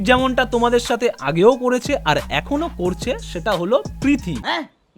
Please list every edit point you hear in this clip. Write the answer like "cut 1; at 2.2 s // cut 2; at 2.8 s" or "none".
none